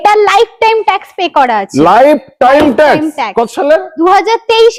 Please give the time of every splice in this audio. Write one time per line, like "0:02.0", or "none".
none